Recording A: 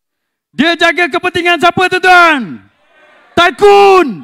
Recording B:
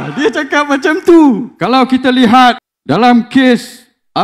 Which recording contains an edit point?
B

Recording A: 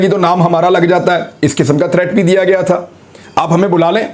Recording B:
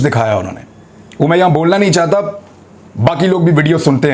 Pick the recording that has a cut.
A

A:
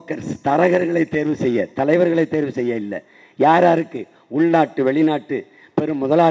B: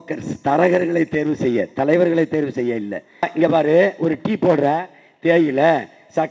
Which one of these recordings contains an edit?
B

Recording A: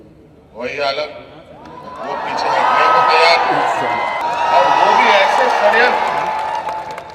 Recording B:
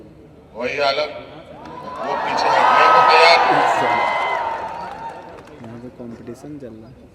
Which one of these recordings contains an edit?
A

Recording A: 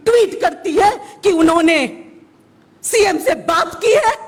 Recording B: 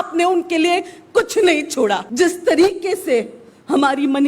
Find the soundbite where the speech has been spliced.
B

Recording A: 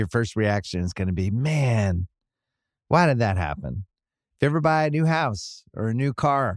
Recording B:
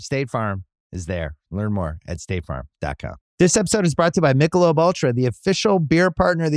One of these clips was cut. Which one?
B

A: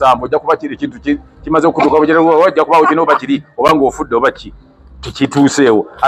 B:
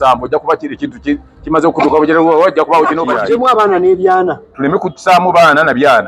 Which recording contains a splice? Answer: B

